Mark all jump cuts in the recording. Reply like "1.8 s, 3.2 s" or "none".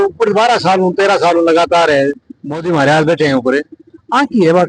none